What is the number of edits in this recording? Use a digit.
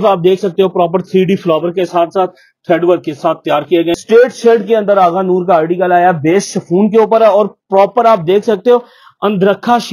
1